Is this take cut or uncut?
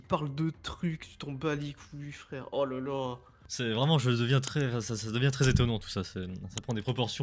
cut